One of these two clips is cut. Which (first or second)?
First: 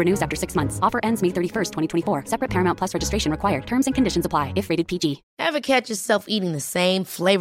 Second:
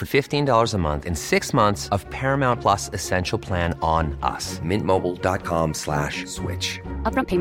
first